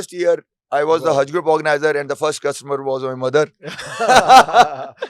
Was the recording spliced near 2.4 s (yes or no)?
no